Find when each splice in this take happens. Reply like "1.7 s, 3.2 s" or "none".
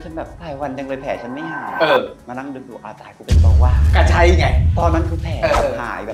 none